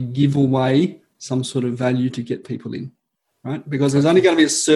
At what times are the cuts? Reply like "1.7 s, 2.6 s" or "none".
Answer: none